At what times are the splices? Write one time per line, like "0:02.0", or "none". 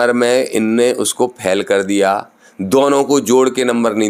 none